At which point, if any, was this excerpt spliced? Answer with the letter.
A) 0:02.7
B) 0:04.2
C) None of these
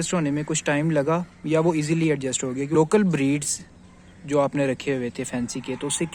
A